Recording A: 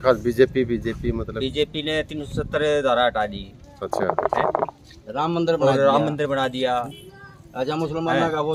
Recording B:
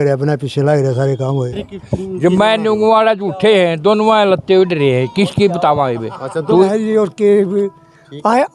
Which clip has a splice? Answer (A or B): B